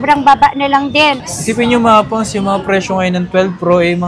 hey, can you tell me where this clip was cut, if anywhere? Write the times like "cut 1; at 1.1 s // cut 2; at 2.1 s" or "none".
cut 1; at 1.2 s